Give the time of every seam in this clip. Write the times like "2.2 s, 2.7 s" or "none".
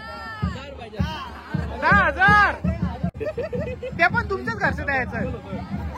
3.1 s